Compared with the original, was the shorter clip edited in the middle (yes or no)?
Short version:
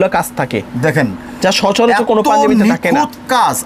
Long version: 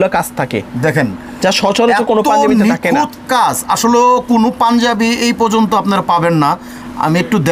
no